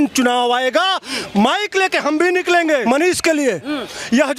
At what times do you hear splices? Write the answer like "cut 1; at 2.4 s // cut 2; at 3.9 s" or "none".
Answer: cut 1; at 2.8 s